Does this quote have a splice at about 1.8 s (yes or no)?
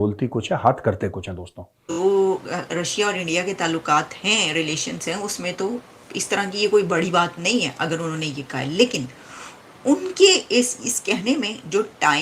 yes